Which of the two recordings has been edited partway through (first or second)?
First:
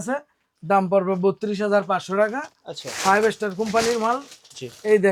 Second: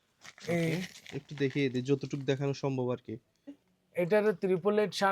second